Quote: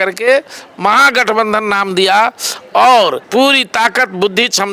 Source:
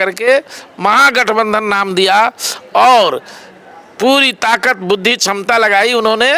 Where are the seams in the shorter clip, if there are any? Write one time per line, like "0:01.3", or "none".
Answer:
0:03.2